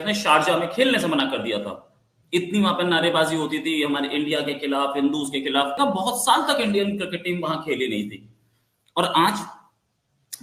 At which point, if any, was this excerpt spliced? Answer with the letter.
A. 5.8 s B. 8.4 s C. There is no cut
A